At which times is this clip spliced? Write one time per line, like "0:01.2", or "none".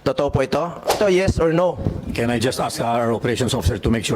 0:01.0